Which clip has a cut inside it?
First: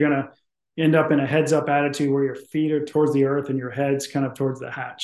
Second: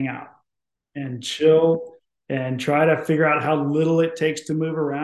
first; 1 cut; at 2.9 s

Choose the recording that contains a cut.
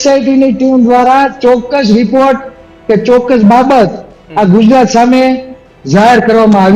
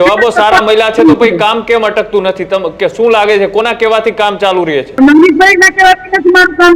second; 1 cut; at 5.0 s

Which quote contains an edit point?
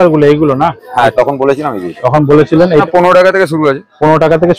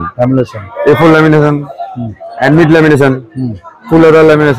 first; 1 cut; at 2.8 s

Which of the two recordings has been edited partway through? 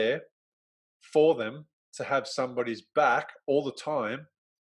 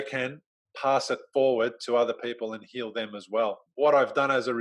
second; 1 cut; at 3.7 s

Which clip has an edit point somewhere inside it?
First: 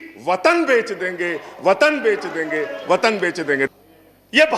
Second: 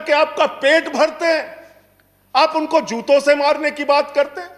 first; 1 cut; at 3.7 s

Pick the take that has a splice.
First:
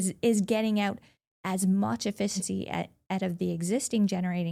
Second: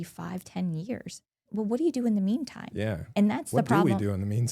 second; 1 cut; at 1.4 s

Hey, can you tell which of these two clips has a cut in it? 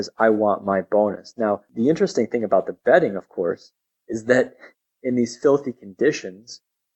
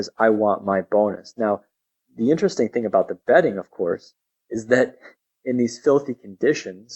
first; 1 cut; at 1.7 s

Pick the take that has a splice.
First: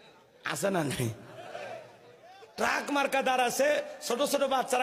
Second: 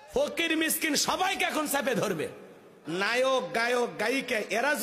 second; 1 cut; at 2.7 s

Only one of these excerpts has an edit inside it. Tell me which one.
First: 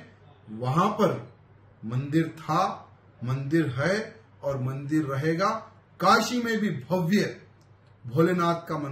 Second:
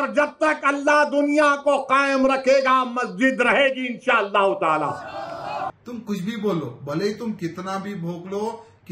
second; 1 cut; at 5.7 s

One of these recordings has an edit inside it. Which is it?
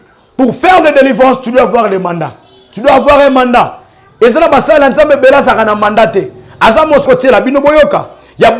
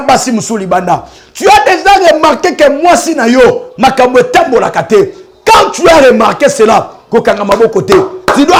first; 1 cut; at 7.0 s

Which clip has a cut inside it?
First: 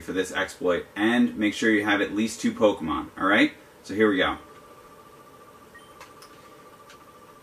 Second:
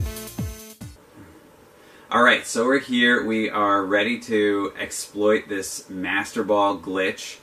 first; 1 cut; at 1.7 s

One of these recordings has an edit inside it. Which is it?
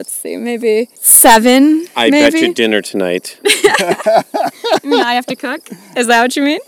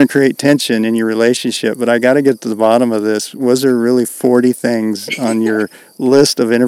first; 1 cut; at 1.0 s

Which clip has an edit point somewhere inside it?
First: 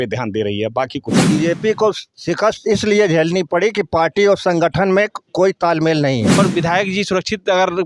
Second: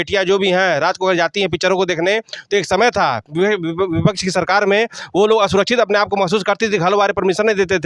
first; 2 cuts; at 1.2 s, 6.4 s

